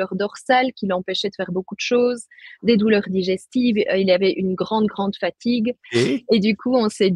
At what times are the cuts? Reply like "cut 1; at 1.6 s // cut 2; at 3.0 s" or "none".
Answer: cut 1; at 5.8 s